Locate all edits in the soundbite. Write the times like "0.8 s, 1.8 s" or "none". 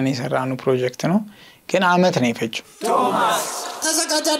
2.7 s